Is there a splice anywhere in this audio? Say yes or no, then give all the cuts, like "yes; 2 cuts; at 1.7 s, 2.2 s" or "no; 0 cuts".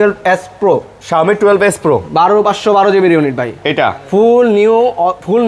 no; 0 cuts